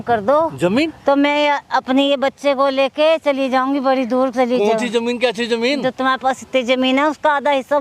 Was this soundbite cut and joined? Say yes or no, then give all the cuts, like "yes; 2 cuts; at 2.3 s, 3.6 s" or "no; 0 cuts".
no; 0 cuts